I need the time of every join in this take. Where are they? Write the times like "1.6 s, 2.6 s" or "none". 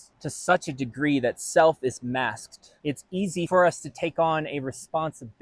3.5 s